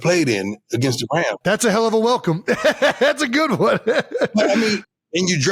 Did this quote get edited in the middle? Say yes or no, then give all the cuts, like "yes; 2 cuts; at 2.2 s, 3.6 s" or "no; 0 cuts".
no; 0 cuts